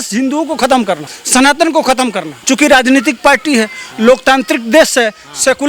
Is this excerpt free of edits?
no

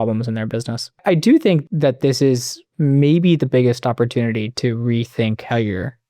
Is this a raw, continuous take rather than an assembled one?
no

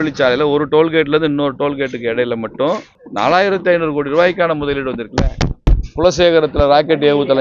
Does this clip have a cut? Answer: yes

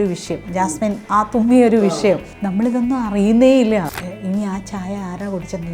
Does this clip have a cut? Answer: yes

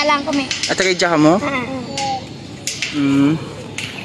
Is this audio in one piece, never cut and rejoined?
yes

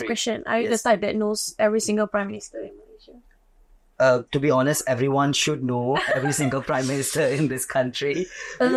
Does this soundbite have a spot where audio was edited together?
no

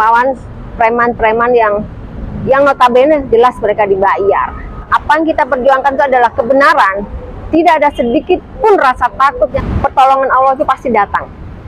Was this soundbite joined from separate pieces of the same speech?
yes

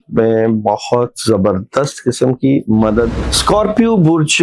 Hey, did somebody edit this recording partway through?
yes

